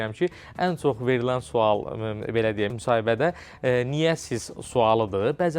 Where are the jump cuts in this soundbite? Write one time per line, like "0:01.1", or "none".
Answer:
none